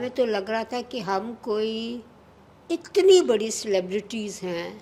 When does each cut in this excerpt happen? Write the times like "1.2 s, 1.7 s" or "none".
none